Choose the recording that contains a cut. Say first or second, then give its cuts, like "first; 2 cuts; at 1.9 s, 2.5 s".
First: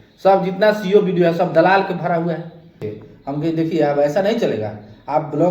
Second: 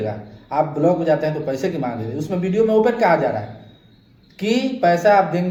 first; 1 cut; at 2.8 s